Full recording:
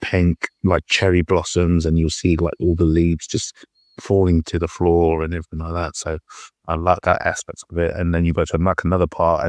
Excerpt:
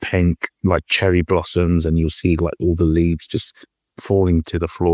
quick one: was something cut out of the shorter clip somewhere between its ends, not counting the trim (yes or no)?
no